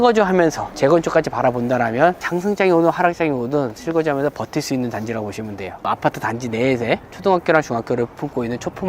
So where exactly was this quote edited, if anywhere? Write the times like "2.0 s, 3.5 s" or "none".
2.2 s, 5.8 s